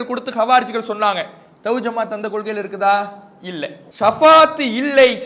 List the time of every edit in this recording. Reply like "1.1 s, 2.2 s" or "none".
3.8 s